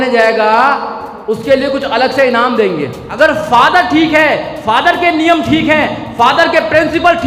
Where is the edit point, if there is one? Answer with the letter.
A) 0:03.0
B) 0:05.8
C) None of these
A